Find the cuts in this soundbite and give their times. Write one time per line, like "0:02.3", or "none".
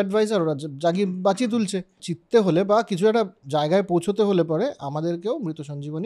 0:02.1

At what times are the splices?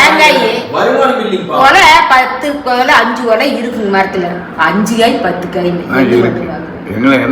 none

